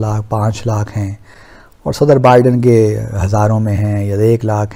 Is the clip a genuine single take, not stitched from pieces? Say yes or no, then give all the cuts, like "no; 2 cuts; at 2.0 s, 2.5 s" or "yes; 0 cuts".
yes; 0 cuts